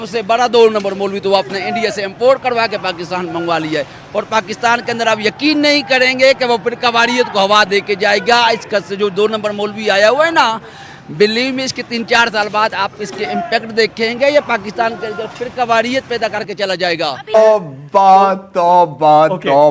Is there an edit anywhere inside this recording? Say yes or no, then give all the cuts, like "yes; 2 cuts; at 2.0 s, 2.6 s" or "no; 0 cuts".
yes; 1 cut; at 17.3 s